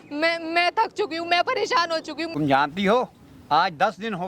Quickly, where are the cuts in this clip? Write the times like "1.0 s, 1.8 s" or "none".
2.3 s